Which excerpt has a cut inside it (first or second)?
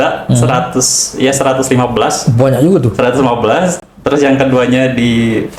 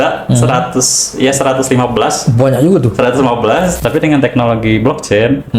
second